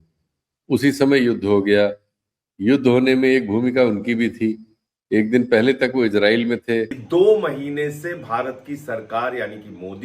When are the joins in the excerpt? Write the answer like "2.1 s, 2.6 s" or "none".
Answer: 7.0 s